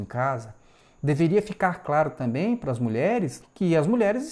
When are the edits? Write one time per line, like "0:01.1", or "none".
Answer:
0:03.4